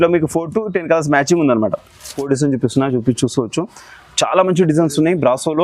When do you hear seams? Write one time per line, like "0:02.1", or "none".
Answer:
0:02.1